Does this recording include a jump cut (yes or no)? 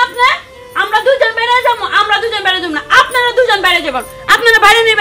no